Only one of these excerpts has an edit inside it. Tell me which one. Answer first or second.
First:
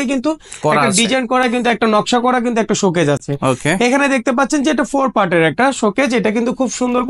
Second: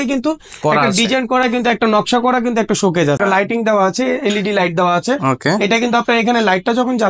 second